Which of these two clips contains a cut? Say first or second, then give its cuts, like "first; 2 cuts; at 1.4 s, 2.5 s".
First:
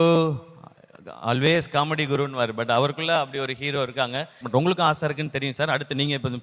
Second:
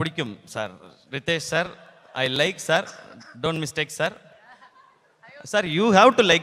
first; 1 cut; at 4.4 s